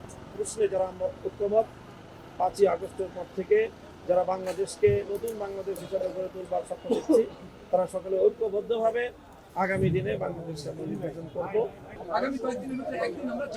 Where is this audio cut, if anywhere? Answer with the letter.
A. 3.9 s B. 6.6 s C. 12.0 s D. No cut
C